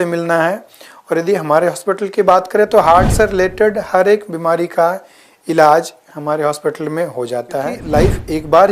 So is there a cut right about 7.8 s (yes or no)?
yes